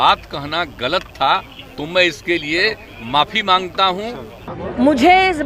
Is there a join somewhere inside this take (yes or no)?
yes